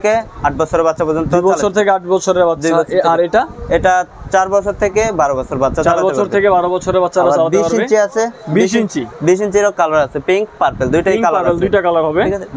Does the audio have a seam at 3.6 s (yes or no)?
no